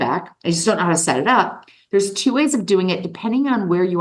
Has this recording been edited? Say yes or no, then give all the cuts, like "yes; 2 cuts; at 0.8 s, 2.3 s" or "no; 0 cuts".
no; 0 cuts